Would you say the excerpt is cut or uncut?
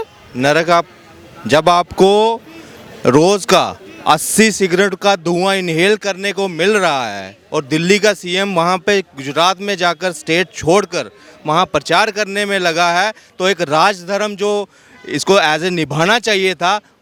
uncut